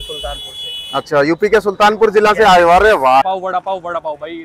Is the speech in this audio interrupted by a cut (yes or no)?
yes